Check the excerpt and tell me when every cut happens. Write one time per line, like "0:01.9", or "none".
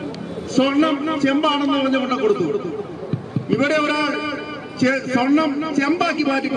none